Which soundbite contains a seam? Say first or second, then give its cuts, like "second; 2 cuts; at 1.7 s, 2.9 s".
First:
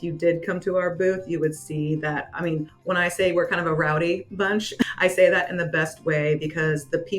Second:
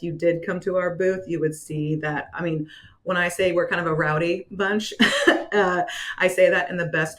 first; 2 cuts; at 2.7 s, 4.8 s